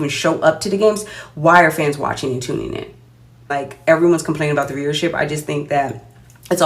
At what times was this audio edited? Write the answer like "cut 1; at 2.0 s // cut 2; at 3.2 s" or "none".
cut 1; at 3.6 s